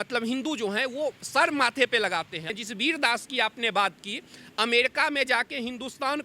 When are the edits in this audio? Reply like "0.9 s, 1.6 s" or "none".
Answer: 2.5 s